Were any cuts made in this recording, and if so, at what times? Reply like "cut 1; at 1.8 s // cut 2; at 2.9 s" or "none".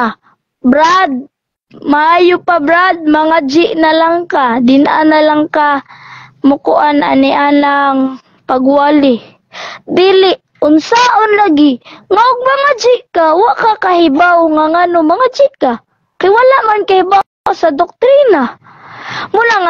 none